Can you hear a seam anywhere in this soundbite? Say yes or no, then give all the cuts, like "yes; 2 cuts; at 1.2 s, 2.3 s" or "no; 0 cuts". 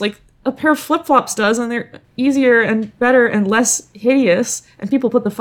no; 0 cuts